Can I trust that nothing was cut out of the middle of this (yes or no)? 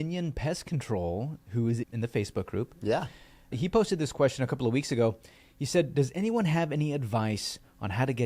no